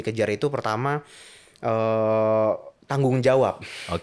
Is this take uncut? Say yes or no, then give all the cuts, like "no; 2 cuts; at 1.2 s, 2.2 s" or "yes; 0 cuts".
yes; 0 cuts